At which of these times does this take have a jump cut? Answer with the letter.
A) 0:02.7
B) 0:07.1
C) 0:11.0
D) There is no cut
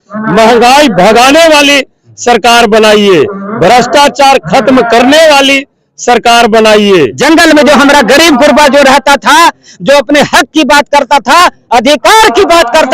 B